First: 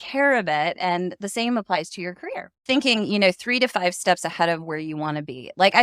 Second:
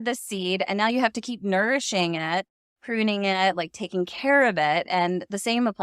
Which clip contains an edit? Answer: first; 1 cut; at 2.6 s

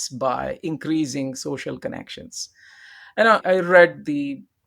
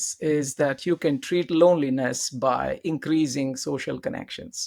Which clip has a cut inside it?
first; 1 cut; at 3.4 s

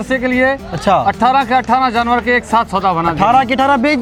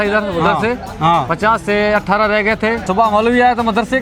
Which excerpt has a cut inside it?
second; 1 cut; at 2.9 s

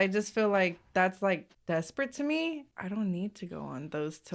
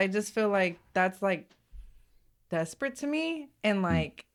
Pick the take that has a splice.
first; 2 cuts; at 1.5 s, 2.7 s

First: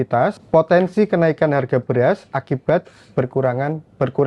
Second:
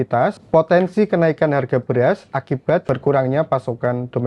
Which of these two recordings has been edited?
second; 1 cut; at 2.8 s

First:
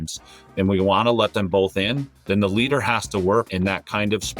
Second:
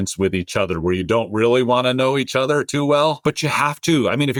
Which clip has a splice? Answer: first; 2 cuts; at 2.1 s, 3.5 s

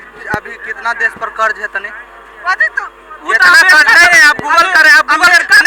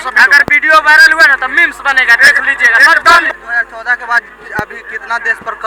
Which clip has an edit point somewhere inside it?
second; 1 cut; at 3.3 s

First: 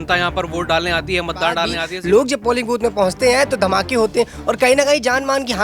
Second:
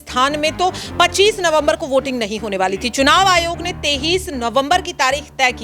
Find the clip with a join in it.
first; 1 cut; at 1.9 s

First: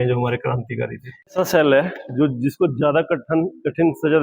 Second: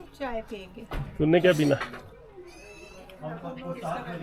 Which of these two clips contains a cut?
first; 1 cut; at 1.2 s

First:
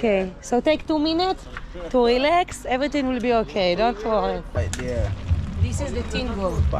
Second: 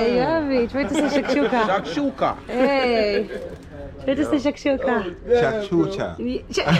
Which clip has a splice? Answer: first; 1 cut; at 4.6 s

